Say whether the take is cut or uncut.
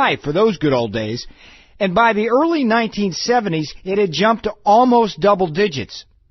uncut